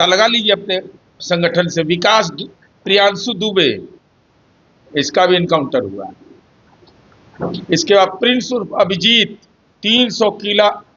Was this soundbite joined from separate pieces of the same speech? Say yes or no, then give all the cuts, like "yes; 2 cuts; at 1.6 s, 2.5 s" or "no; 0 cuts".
no; 0 cuts